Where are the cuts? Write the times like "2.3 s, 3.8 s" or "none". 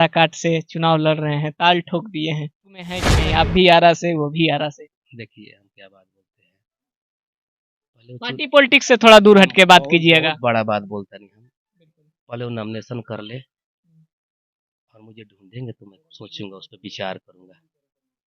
3.1 s

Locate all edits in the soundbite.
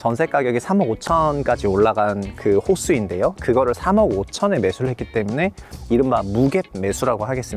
none

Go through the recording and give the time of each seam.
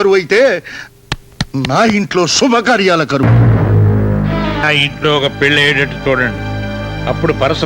3.2 s, 4.6 s

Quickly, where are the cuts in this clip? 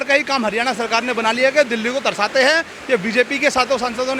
none

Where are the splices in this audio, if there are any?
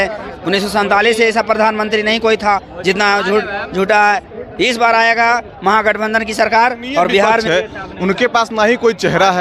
7.4 s

